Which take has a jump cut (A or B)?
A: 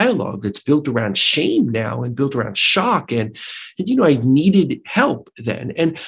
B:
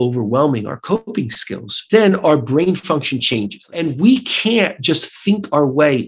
B